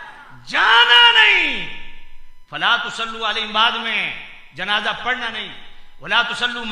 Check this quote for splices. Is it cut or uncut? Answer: uncut